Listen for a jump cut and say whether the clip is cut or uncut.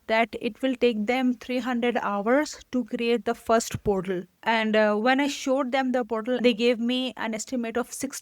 cut